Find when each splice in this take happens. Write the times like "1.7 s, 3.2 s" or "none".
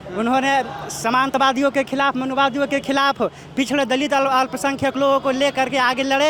none

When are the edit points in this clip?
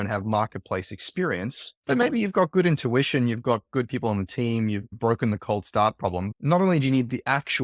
6.3 s

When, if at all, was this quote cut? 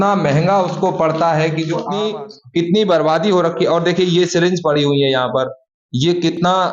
1.9 s

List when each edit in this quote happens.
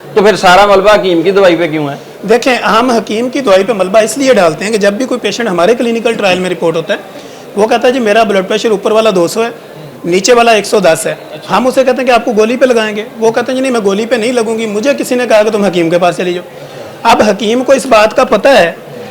none

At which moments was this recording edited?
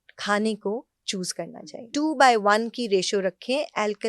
1.8 s

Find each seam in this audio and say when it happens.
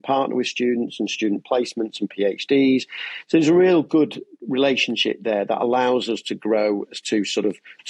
none

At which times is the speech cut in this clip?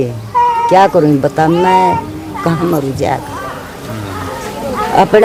none

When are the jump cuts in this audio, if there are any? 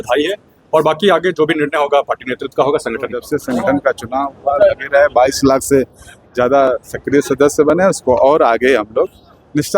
3.3 s

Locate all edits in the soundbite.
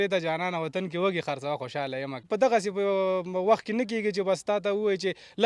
2.2 s

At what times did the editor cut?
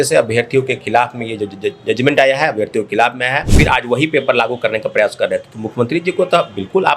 3.5 s

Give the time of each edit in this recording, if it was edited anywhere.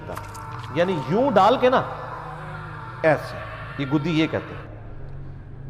4.6 s

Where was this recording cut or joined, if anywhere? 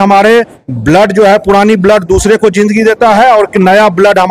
none

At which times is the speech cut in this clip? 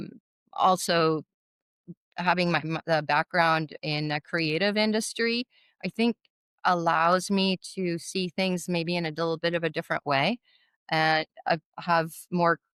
none

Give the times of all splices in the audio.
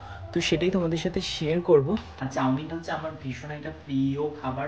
2.2 s

